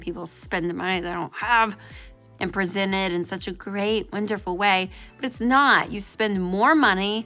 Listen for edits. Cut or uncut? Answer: cut